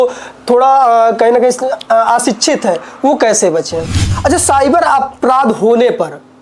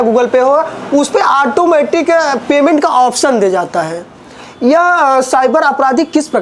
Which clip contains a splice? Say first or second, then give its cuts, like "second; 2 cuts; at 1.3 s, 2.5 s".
first; 1 cut; at 4.0 s